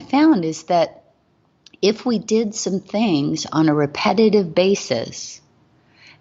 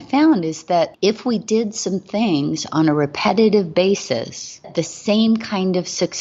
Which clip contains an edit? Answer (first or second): second